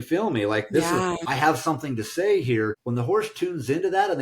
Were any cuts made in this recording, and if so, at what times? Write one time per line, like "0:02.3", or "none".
0:01.2
0:02.8